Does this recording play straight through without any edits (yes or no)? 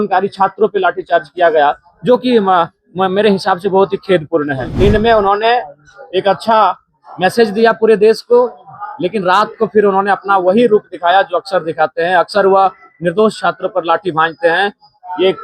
no